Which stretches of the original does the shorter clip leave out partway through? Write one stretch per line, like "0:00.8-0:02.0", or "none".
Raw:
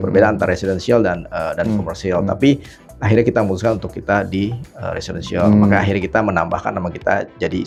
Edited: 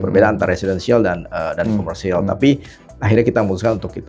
none